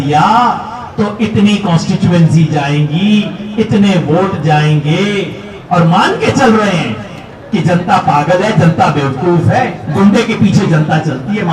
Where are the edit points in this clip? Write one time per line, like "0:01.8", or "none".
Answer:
none